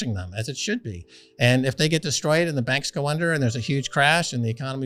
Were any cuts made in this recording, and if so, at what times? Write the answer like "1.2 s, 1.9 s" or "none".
none